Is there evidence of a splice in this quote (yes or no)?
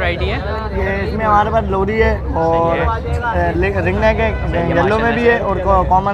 no